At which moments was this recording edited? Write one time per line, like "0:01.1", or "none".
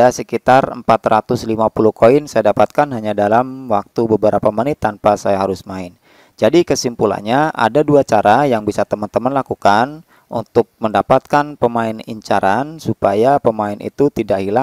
none